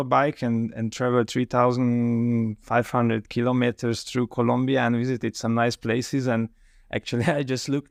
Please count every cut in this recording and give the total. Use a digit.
0